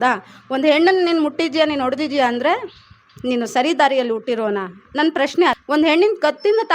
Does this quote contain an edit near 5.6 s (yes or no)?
yes